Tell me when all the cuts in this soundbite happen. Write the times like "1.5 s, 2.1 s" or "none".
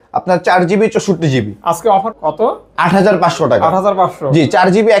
2.1 s